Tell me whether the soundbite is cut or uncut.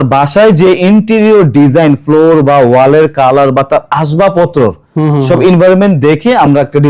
uncut